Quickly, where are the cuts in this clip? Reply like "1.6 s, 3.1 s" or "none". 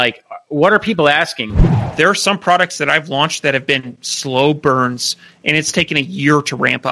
1.7 s

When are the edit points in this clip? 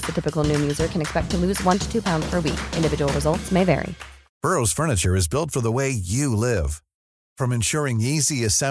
4.2 s

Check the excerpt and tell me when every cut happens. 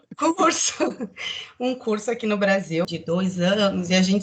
2.9 s

